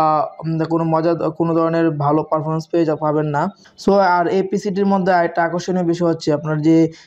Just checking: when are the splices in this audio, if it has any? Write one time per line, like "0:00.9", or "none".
0:03.7

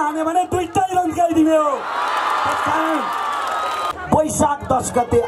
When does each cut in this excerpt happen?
0:03.9

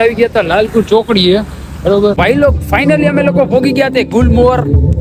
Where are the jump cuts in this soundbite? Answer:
0:02.2

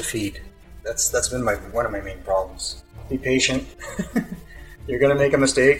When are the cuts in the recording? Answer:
0:03.0

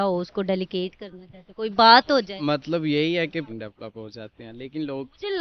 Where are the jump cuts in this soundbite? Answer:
0:03.5

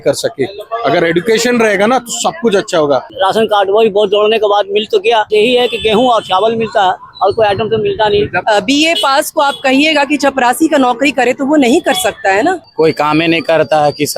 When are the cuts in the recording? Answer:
0:03.1
0:05.3
0:08.4
0:12.7

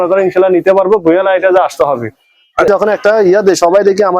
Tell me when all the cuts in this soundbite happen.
0:02.7

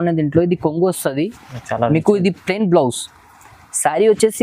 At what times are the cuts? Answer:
none

